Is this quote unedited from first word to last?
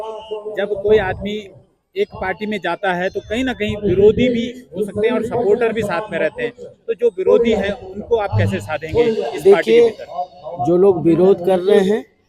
yes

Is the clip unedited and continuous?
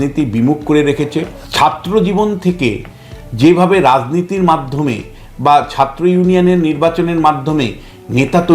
no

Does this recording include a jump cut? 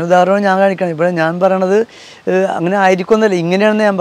no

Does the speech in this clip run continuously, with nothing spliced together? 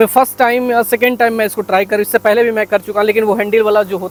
yes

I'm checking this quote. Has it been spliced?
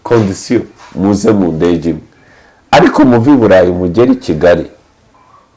no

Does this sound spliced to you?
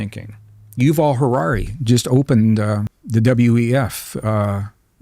yes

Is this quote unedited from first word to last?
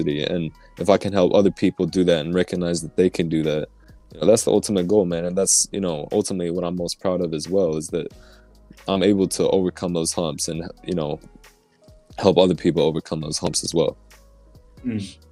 yes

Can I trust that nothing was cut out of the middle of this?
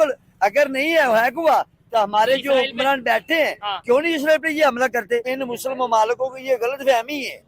no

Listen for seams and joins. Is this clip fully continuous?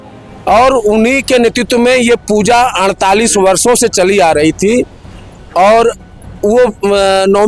yes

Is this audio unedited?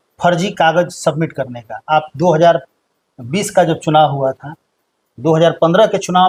yes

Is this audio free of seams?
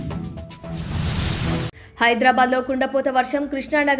no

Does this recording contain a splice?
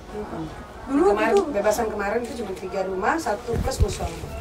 no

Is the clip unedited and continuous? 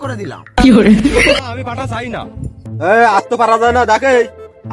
no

